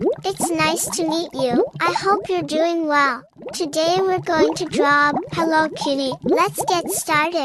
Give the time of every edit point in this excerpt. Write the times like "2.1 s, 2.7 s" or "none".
5.3 s, 6.3 s